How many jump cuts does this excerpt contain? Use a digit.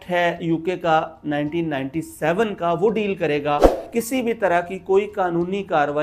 1